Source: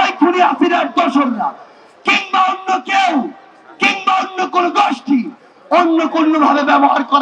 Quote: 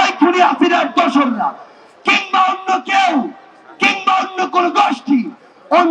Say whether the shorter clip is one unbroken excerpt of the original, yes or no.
yes